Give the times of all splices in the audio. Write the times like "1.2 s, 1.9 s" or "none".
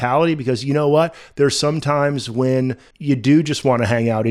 2.9 s